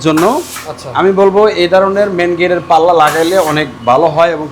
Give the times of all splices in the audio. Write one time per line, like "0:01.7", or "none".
none